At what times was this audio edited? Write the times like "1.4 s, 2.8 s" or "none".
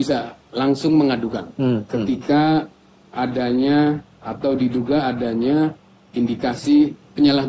none